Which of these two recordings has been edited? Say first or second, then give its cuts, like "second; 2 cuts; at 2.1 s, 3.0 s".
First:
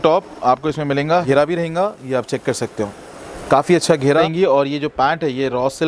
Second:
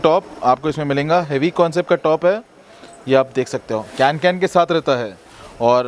first; 2 cuts; at 1.2 s, 4.3 s